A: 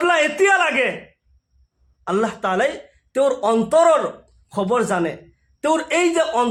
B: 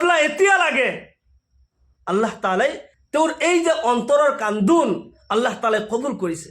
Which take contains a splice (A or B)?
B